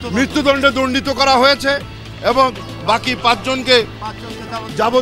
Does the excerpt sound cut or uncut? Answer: uncut